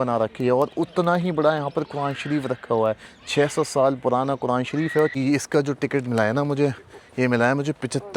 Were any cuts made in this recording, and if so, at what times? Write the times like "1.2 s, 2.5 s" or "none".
5.2 s